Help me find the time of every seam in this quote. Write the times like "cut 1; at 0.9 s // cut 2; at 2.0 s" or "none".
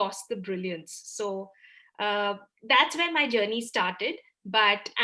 none